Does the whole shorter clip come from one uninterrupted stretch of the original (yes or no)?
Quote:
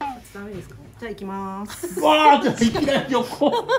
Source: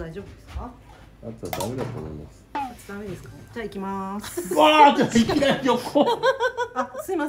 yes